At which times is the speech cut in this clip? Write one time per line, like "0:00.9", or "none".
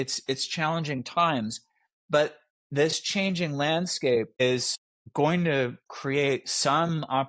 none